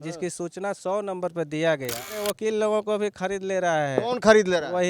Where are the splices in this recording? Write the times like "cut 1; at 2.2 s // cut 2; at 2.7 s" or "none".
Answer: cut 1; at 2.1 s